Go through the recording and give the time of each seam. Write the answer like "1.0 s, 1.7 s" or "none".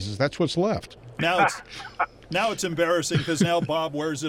1.0 s